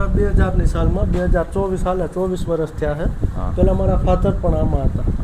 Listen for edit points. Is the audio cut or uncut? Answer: uncut